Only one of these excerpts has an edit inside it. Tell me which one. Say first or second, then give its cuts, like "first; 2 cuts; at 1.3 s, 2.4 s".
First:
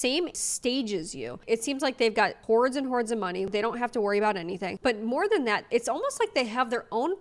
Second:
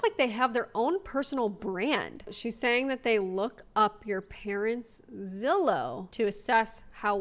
second; 2 cuts; at 2.2 s, 6.0 s